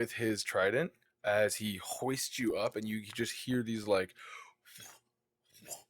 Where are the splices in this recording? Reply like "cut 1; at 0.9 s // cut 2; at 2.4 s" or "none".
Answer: cut 1; at 1.1 s